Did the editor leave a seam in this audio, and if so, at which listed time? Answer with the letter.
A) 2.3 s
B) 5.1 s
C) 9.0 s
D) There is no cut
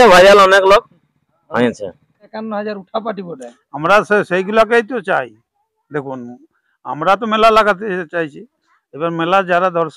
A